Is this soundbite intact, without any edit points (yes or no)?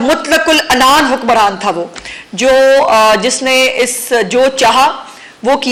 yes